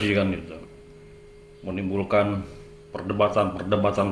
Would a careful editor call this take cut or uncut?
uncut